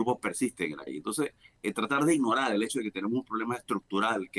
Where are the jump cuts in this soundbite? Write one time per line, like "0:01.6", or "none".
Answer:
0:01.2

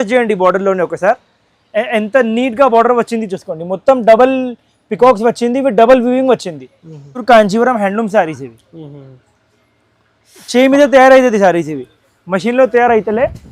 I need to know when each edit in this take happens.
0:07.2

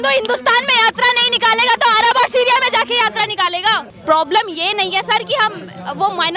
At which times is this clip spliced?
0:03.9

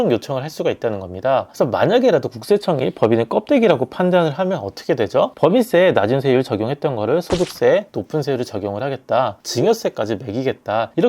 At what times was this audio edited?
0:01.5
0:09.4

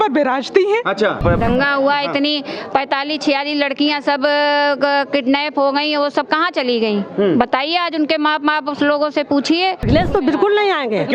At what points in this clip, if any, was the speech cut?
0:01.2
0:09.8

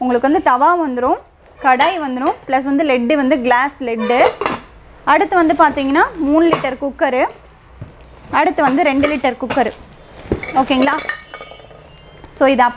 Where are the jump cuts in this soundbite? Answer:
none

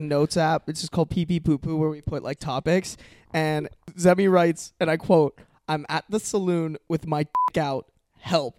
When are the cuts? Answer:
0:03.8

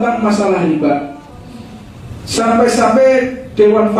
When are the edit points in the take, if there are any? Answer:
none

